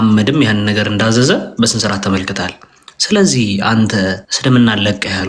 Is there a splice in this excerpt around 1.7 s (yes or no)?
no